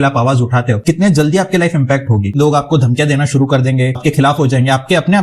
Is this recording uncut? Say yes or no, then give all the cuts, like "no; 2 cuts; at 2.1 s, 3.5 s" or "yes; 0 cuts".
no; 3 cuts; at 0.8 s, 2.3 s, 4.0 s